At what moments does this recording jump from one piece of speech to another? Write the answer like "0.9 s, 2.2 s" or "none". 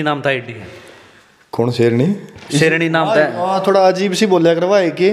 none